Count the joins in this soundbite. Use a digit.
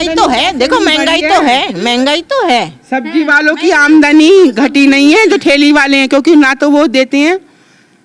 0